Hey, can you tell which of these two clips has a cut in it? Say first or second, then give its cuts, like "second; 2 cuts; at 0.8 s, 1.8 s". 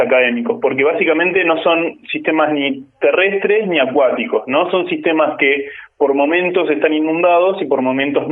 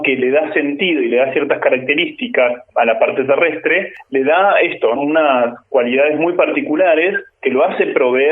second; 4 cuts; at 2.7 s, 3.9 s, 5.0 s, 7.3 s